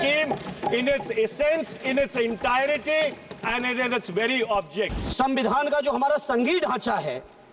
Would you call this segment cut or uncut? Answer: cut